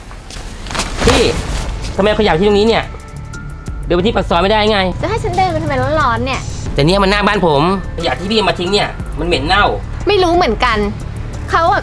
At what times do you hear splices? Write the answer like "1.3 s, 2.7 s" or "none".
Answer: 5.0 s, 6.5 s, 7.9 s, 9.9 s